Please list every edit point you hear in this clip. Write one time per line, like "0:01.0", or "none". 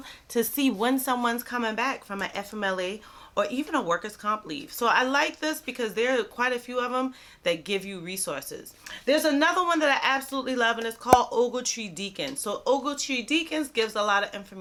none